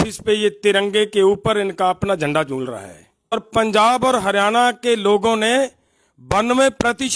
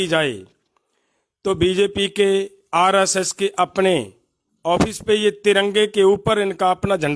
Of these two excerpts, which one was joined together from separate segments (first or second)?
first